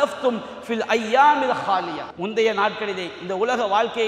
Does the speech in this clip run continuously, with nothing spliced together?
no; 1 cut; at 2.0 s

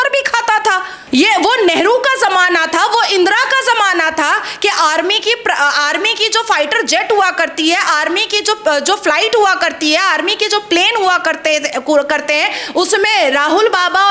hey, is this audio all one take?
no; 1 cut; at 0.9 s

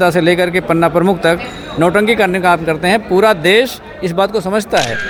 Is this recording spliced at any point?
no; 0 cuts

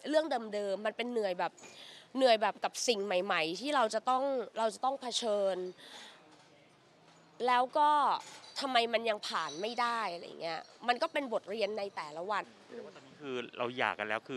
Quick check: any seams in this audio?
yes; 1 cut; at 12.6 s

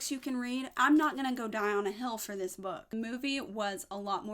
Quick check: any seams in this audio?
yes; 1 cut; at 2.9 s

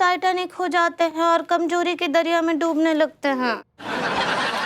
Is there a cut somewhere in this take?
yes; 1 cut; at 3.7 s

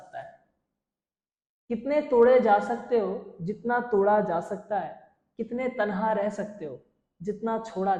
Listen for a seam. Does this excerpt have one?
no; 0 cuts

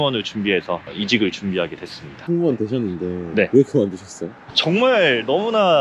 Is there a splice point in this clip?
no; 0 cuts

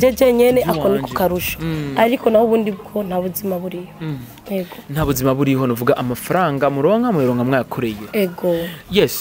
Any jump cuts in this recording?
no; 0 cuts

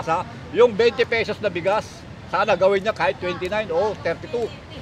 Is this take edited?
no; 0 cuts

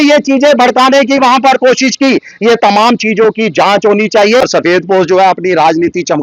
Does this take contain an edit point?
yes; 1 cut; at 4.4 s

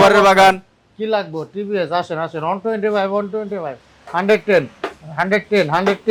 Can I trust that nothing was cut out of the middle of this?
yes; 0 cuts

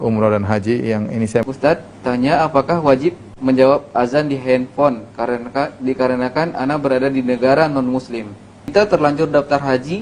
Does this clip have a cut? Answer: yes; 2 cuts; at 1.4 s, 8.7 s

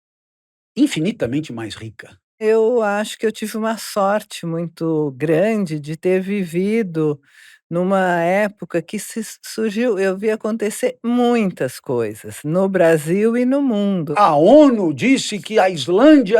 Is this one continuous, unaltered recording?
no; 2 cuts; at 2.4 s, 14.1 s

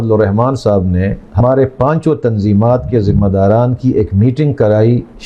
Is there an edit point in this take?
yes; 1 cut; at 1.4 s

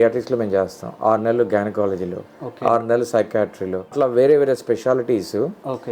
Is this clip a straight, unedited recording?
no; 1 cut; at 3.9 s

